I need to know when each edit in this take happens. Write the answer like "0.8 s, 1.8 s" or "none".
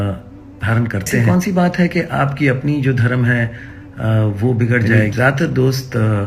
1.2 s, 5.0 s